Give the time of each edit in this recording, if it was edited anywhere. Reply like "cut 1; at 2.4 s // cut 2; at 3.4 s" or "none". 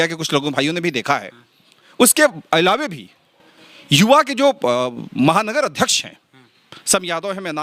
none